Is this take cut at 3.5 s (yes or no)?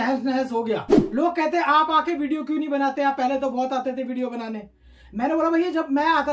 no